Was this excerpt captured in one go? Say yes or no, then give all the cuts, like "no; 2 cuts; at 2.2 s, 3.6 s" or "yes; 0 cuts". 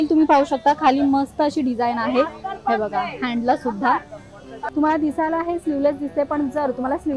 no; 1 cut; at 4.7 s